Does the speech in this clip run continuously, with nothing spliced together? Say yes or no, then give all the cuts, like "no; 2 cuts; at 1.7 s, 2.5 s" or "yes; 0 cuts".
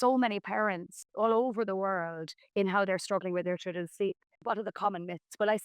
no; 2 cuts; at 1.0 s, 4.4 s